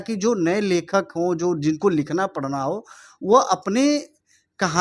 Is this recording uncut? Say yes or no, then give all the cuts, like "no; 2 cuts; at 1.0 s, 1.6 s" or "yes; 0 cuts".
yes; 0 cuts